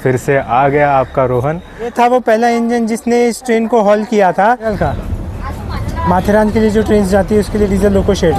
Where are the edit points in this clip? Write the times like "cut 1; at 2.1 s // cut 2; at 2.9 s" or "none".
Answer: cut 1; at 1.9 s // cut 2; at 4.7 s